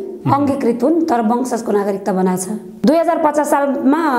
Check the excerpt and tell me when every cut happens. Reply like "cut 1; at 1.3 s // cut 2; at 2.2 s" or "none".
cut 1; at 2.7 s